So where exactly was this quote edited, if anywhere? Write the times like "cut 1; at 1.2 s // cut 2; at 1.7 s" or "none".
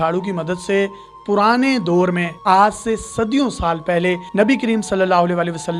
none